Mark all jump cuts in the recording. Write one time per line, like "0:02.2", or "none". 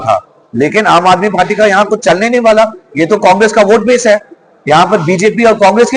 none